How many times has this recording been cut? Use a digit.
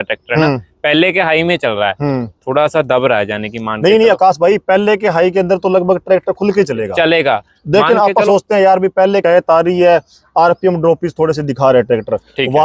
1